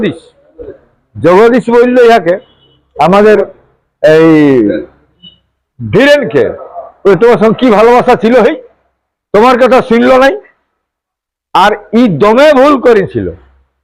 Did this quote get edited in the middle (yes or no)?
no